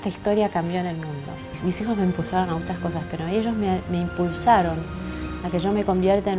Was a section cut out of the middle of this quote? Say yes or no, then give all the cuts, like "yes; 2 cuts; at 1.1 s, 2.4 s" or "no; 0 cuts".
yes; 1 cut; at 1.6 s